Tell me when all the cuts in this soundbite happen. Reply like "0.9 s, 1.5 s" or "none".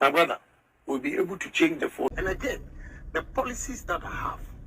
2.1 s